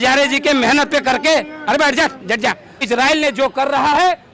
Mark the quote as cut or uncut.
cut